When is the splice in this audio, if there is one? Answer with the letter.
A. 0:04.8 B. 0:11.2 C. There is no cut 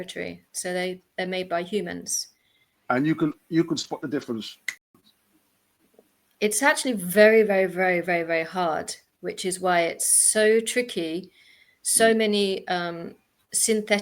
A